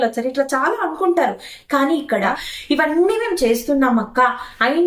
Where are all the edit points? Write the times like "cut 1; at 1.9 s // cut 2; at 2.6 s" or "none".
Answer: cut 1; at 2.1 s